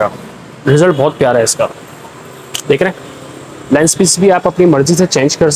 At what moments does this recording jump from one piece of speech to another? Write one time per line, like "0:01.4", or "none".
none